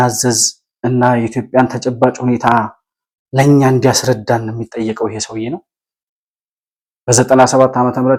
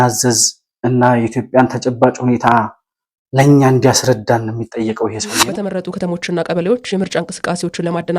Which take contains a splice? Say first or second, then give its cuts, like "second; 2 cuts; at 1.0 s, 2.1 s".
second; 1 cut; at 5.6 s